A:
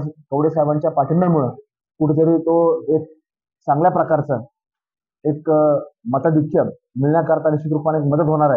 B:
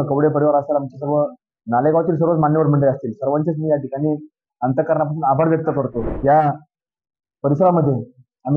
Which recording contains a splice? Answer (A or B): B